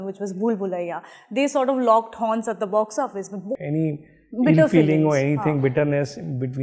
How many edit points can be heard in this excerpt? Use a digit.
1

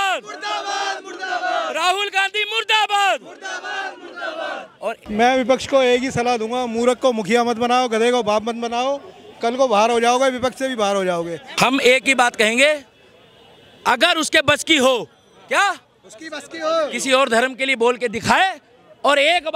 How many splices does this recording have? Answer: 2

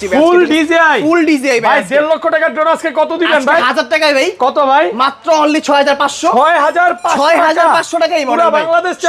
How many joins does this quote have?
0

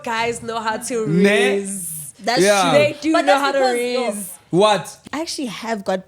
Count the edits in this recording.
1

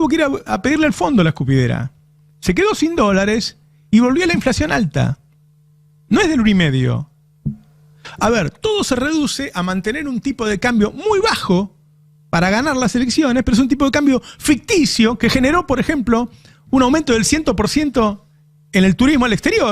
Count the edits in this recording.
0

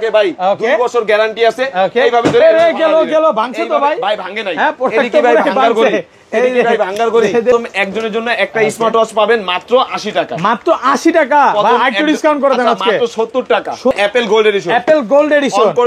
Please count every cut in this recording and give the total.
2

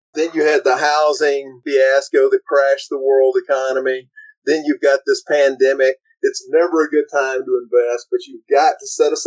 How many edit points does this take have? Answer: 1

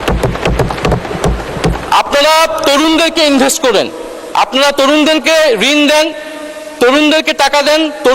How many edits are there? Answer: 1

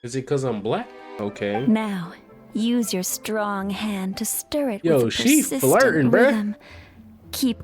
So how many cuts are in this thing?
1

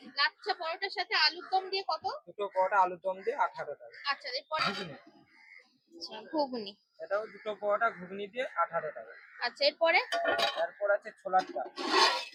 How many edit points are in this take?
0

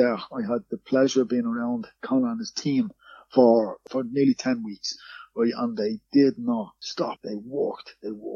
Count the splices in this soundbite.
3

